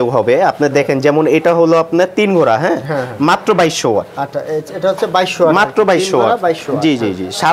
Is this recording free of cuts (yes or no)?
yes